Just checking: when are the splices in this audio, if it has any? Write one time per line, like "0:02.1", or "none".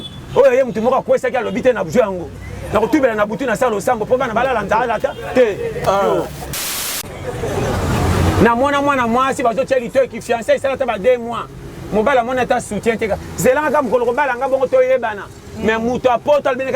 0:06.7